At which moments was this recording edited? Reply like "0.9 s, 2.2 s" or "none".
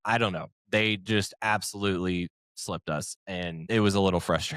3.6 s